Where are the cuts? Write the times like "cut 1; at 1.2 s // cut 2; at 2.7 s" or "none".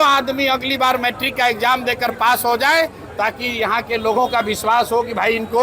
none

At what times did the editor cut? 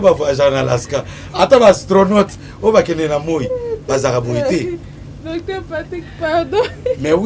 none

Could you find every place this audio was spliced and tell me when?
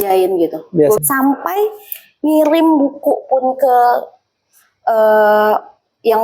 cut 1; at 1.0 s

